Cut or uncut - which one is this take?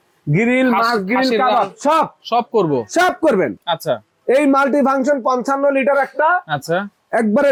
uncut